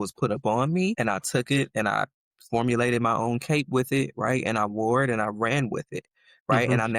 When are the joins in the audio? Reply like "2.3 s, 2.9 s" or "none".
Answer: 1.0 s